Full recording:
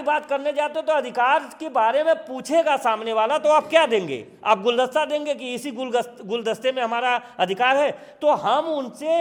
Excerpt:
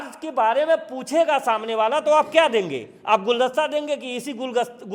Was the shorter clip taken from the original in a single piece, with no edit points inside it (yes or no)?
yes